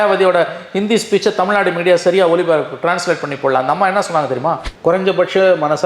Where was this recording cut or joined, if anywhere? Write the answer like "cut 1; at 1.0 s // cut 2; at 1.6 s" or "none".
cut 1; at 4.7 s